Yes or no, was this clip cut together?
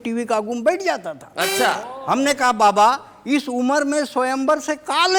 no